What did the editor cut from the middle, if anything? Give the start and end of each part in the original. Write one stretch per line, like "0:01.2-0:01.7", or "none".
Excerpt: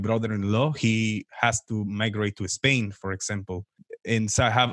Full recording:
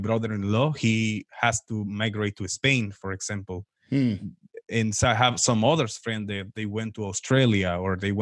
0:03.7-0:04.4